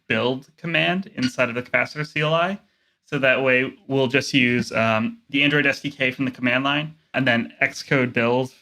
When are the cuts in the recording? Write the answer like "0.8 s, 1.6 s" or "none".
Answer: 5.2 s, 7.1 s

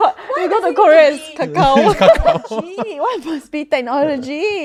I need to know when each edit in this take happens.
none

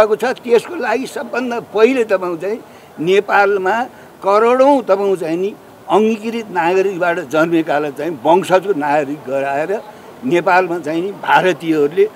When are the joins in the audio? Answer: none

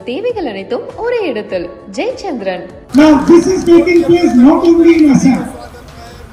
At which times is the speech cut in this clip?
2.7 s

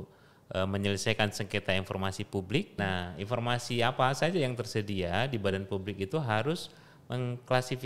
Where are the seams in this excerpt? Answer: 2.8 s

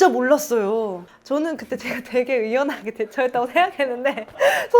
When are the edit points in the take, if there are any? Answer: 1.0 s

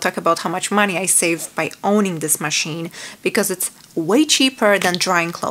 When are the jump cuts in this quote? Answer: none

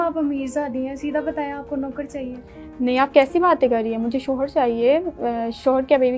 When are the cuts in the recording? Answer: none

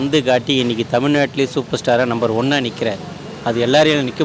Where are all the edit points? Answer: none

